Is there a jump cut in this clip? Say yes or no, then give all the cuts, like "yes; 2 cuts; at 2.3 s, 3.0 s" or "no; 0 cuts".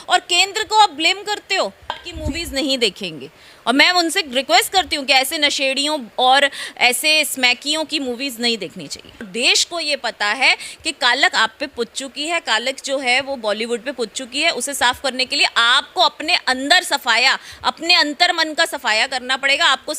yes; 2 cuts; at 2.1 s, 9.3 s